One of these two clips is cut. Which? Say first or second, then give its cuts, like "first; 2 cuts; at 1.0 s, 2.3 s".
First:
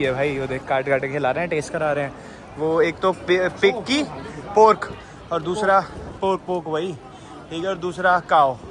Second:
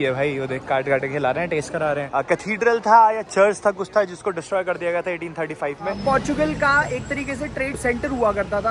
second; 3 cuts; at 2.1 s, 6.0 s, 7.8 s